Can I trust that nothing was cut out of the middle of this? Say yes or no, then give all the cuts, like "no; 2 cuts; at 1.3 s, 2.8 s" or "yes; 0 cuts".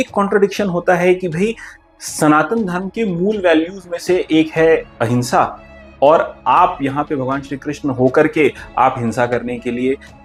yes; 0 cuts